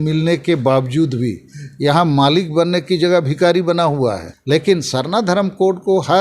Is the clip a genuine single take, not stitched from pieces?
no; 1 cut; at 4.4 s

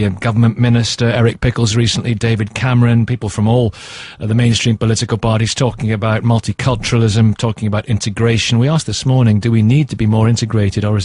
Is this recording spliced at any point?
no; 0 cuts

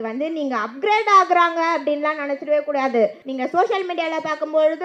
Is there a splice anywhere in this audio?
yes; 1 cut; at 3.2 s

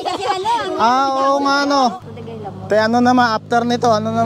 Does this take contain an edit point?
yes; 1 cut; at 2.1 s

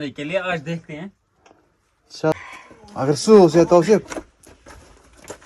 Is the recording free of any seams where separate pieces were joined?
no; 1 cut; at 2.3 s

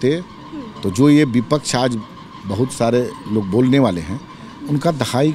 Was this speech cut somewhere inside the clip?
no; 0 cuts

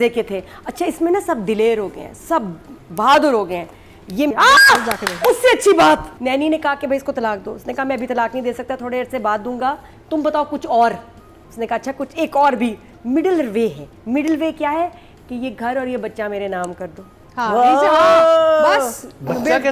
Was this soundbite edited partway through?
yes; 2 cuts; at 4.3 s, 6.1 s

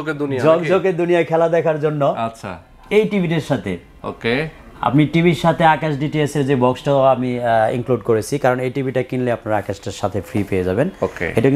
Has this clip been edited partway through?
no; 0 cuts

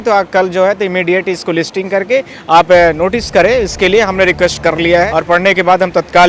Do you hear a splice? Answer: yes; 1 cut; at 5.1 s

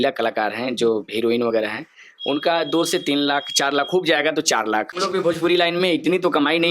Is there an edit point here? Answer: yes; 1 cut; at 4.9 s

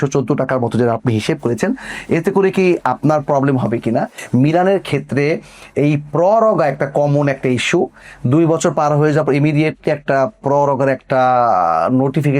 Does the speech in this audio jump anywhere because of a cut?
yes; 1 cut; at 4.2 s

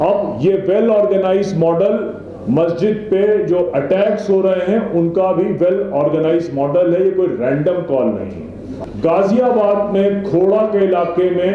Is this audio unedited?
yes; 0 cuts

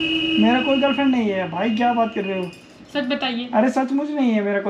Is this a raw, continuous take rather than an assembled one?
yes; 0 cuts

